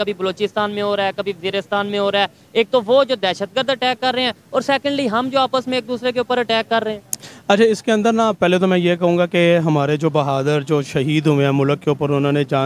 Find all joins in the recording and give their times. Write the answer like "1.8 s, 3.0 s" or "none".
none